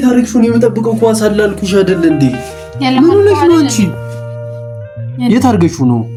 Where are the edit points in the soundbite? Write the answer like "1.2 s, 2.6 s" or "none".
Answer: none